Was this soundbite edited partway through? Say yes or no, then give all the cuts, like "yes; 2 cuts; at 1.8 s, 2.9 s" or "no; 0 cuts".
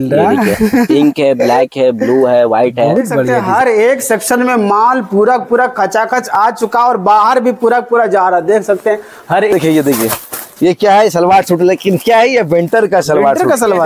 yes; 2 cuts; at 3.4 s, 9.5 s